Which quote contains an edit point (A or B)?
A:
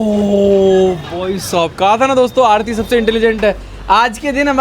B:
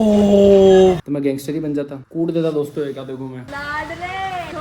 B